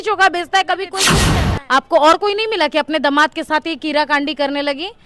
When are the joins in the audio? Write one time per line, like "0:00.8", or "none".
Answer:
0:01.1